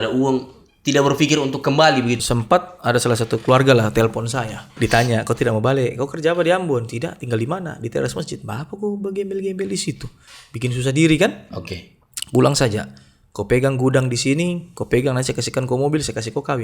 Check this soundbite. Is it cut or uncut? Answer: cut